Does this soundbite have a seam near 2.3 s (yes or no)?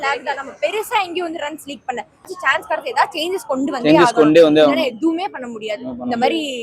yes